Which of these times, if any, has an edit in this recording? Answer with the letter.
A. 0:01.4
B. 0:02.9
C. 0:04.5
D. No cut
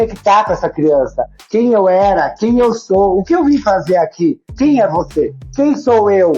C